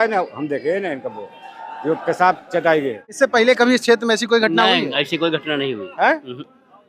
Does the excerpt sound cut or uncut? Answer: cut